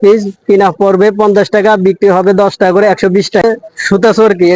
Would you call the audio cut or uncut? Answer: cut